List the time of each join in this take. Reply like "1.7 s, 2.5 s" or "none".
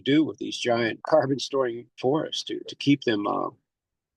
1.0 s, 1.9 s